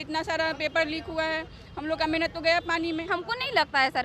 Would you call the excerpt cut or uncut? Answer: cut